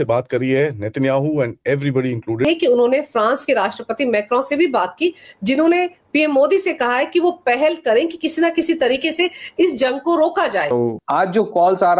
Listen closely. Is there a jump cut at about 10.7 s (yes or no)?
yes